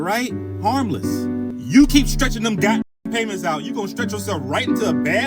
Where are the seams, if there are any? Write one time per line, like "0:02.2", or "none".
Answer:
0:01.5